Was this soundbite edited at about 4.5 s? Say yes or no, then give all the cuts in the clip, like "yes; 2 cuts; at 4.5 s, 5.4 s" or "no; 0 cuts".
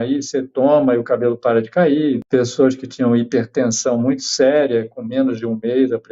no; 1 cut; at 2.2 s